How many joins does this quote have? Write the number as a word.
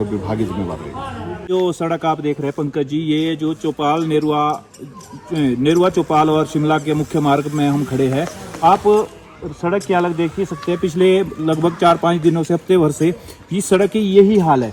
zero